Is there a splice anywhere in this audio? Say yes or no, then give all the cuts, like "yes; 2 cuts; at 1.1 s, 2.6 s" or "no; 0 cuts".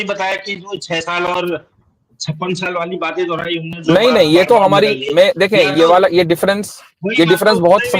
no; 0 cuts